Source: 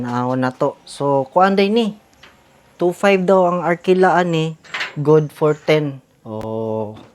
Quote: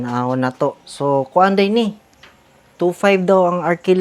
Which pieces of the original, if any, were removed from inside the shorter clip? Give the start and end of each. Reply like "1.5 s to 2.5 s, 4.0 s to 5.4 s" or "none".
none